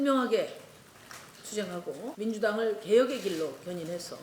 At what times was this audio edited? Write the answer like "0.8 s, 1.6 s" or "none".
2.0 s